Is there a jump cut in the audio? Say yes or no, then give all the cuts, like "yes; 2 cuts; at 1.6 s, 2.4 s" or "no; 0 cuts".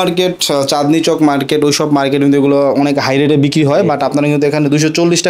no; 0 cuts